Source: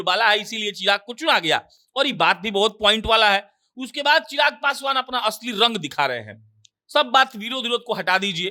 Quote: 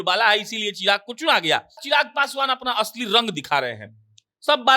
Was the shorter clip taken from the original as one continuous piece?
no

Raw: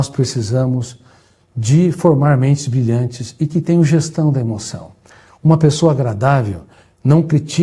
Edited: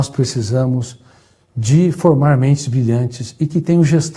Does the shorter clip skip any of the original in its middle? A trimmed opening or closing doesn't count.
no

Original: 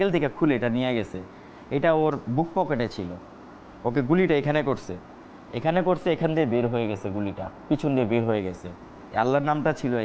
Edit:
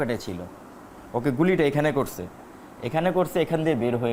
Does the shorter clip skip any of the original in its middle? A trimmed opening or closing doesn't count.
no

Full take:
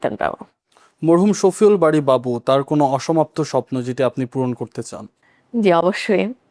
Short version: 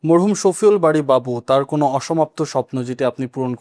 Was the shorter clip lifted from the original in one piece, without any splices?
yes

